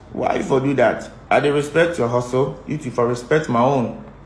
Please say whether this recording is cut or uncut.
cut